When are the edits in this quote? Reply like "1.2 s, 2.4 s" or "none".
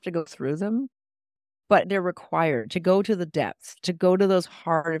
1.8 s